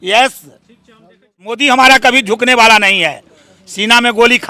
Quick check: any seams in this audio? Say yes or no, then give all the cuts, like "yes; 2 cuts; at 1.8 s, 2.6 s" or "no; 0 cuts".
yes; 1 cut; at 1.6 s